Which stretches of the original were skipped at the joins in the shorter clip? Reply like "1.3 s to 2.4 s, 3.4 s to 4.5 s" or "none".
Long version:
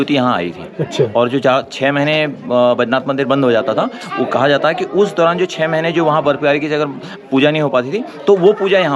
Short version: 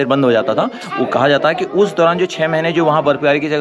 none